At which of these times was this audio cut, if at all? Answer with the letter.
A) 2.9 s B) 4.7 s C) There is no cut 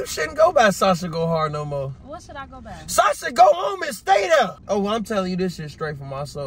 B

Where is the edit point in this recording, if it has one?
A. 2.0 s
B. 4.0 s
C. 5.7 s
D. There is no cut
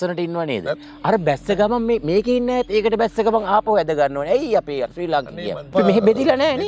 C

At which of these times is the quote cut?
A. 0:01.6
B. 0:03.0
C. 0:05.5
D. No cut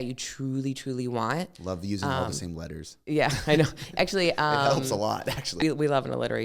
C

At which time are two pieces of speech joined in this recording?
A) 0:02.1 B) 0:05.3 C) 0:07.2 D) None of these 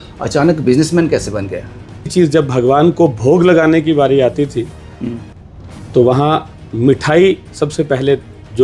A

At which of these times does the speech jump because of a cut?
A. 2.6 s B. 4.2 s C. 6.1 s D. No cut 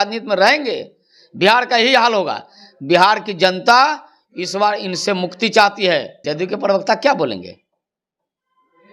C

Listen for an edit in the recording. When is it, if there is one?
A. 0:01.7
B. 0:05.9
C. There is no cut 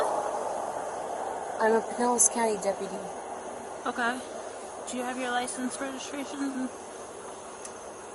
C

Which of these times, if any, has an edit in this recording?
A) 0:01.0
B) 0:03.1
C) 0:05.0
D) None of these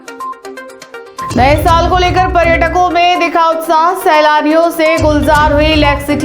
A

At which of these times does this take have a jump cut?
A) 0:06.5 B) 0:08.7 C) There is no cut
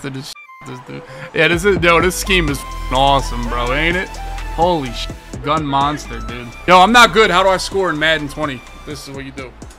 A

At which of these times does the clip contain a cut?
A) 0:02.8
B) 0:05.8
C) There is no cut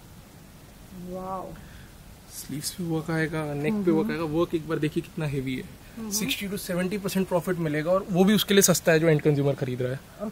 B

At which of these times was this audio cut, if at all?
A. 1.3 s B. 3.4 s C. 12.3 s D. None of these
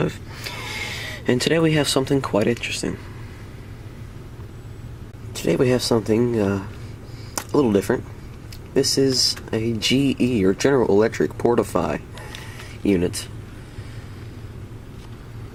D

